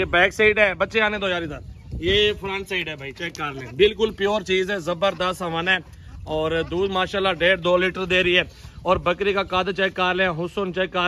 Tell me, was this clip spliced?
no; 0 cuts

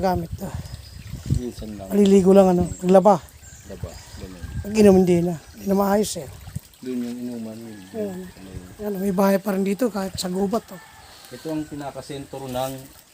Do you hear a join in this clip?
no; 0 cuts

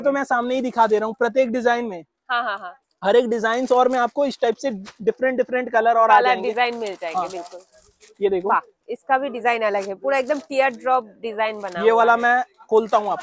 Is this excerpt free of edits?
yes; 0 cuts

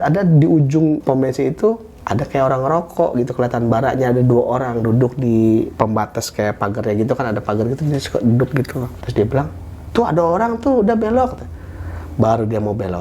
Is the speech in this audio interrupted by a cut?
yes; 4 cuts; at 1.0 s, 1.9 s, 5.7 s, 9.0 s

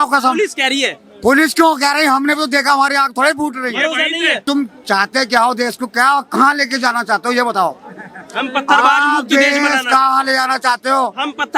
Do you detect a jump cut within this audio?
yes; 1 cut; at 4.4 s

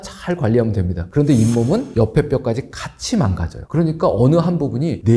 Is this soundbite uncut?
yes; 0 cuts

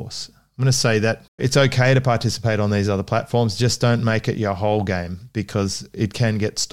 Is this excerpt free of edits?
no; 1 cut; at 1.4 s

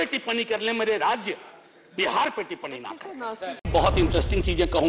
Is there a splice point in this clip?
yes; 1 cut; at 3.7 s

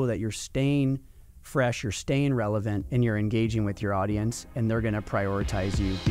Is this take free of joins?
no; 1 cut; at 2.8 s

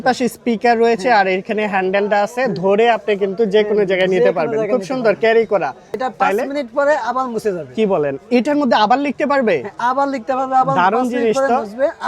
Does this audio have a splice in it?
yes; 1 cut; at 5.8 s

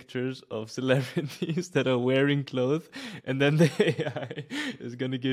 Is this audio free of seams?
yes; 0 cuts

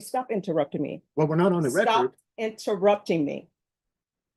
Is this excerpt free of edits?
yes; 0 cuts

